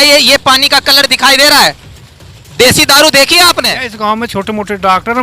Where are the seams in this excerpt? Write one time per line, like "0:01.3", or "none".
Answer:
0:03.9

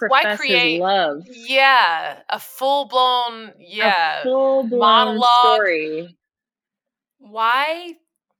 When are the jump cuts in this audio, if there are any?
none

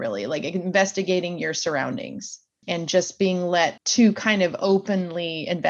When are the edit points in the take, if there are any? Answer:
0:02.6
0:03.8

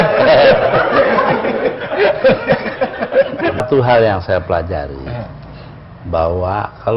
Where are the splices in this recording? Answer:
0:03.6

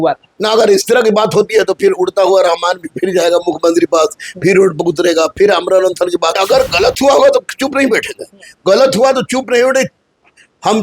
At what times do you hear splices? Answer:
0:06.4

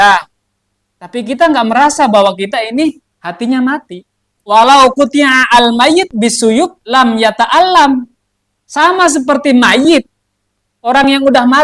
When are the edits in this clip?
0:04.3

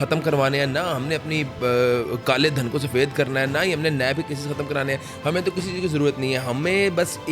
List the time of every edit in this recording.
none

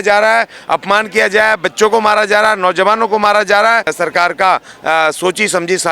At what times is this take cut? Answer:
0:03.9

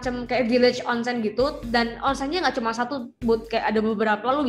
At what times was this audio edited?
none

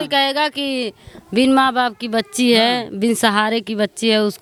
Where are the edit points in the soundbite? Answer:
none

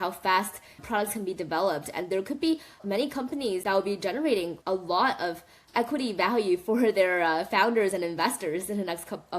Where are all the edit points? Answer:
0:03.6

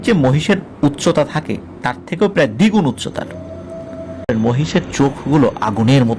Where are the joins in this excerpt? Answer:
0:04.3

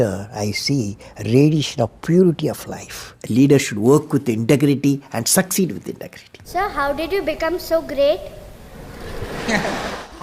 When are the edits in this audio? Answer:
0:03.1
0:06.5

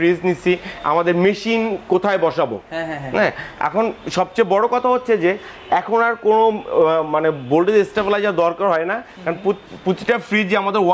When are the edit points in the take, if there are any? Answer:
none

